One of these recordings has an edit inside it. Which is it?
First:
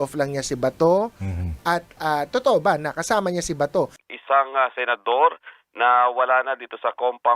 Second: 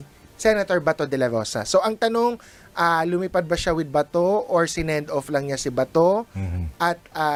first; 1 cut; at 4.1 s

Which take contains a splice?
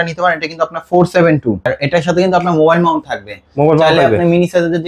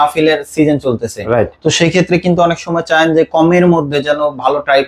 first; 1 cut; at 1.7 s

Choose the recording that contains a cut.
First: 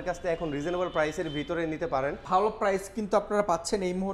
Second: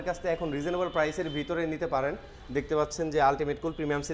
first; 1 cut; at 2.2 s

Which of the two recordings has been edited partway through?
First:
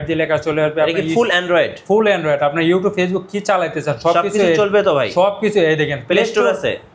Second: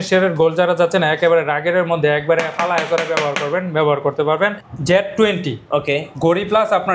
second; 1 cut; at 4.6 s

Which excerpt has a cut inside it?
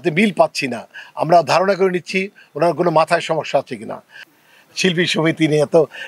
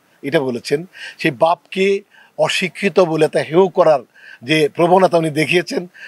first; 1 cut; at 4.2 s

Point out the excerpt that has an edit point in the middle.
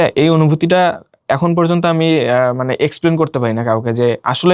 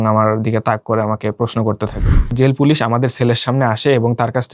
second; 1 cut; at 2.3 s

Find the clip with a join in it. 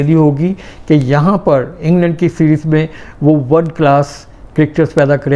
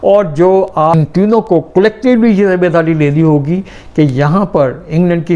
second; 1 cut; at 0.9 s

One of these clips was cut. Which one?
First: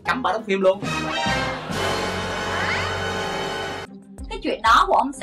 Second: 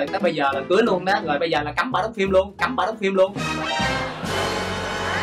first; 1 cut; at 3.8 s

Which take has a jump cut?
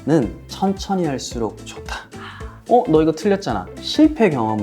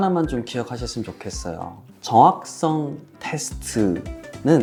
first; 2 cuts; at 2.5 s, 3.7 s

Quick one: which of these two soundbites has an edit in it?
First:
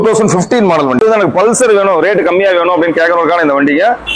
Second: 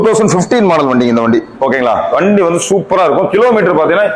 first; 1 cut; at 1.0 s

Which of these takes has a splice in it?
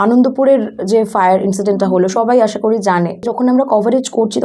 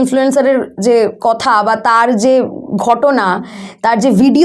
first; 1 cut; at 3.2 s

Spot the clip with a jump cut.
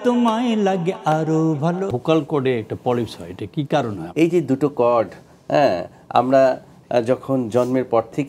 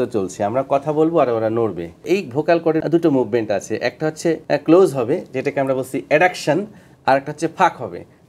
first; 2 cuts; at 1.9 s, 4.0 s

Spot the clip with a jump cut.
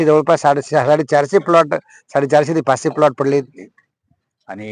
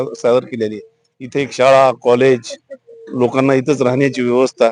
first; 1 cut; at 3.6 s

